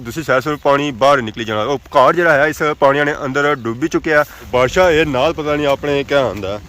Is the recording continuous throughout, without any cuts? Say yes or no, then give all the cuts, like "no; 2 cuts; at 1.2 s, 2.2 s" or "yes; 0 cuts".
no; 1 cut; at 4.5 s